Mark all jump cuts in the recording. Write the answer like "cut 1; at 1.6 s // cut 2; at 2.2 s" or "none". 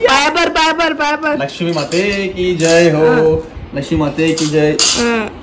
none